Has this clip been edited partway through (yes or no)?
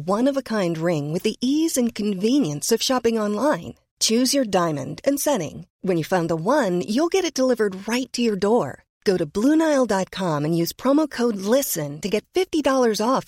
no